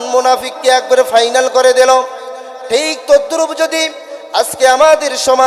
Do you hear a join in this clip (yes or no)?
no